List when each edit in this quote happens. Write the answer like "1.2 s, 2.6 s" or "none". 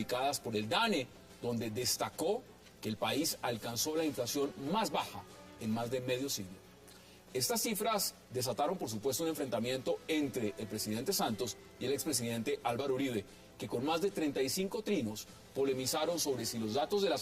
7.5 s